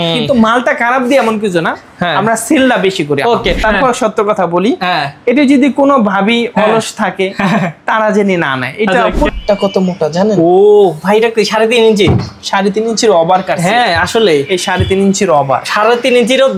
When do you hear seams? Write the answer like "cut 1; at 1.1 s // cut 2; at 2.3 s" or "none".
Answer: cut 1; at 3.6 s // cut 2; at 9.3 s